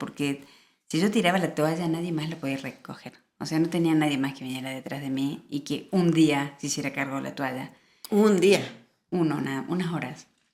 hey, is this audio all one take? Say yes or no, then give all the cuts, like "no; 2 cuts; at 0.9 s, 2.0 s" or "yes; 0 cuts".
yes; 0 cuts